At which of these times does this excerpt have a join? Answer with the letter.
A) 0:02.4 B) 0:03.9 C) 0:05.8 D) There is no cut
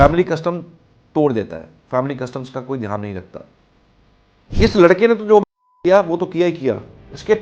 B